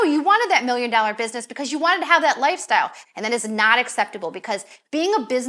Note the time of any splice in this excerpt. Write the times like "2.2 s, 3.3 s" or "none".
3.0 s